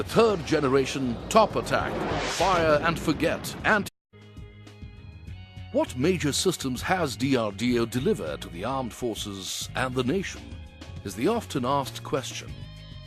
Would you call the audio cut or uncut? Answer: uncut